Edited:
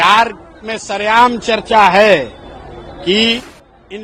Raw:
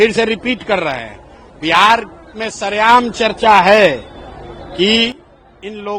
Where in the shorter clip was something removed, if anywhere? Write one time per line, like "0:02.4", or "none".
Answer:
none

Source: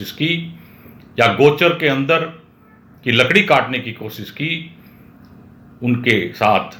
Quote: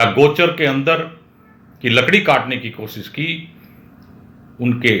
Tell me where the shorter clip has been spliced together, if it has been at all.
none

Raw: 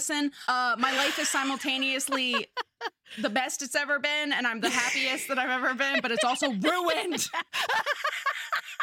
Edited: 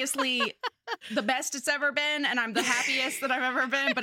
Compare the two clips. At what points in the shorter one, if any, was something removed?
0:01.0

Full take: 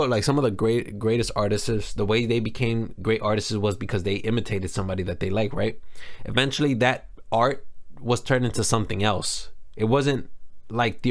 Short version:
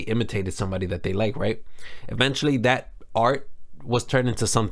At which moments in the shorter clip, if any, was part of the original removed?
none

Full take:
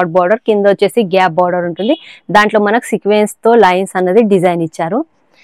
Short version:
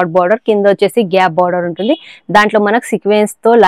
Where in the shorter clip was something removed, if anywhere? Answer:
none

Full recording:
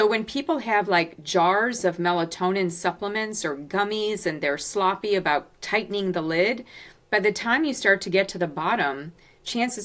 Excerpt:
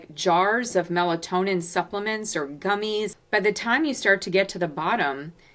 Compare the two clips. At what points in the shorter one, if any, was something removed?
0:03.1

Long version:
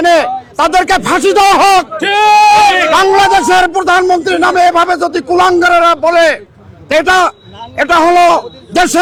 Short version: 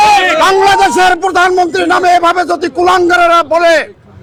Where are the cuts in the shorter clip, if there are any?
none

